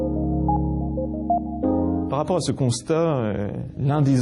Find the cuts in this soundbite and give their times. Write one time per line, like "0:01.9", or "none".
0:01.8